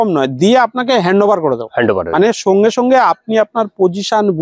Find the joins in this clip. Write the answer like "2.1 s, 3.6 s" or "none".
none